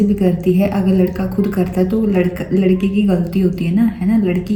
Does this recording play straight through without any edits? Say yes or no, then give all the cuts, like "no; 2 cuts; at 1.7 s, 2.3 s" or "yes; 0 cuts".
yes; 0 cuts